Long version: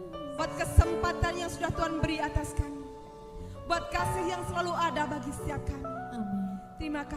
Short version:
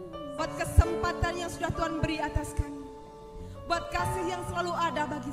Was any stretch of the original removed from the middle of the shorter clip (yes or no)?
no